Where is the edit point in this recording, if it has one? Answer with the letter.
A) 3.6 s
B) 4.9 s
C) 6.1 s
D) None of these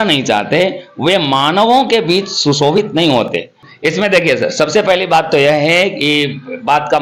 A